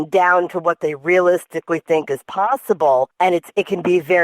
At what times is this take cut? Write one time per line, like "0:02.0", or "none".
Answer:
0:03.1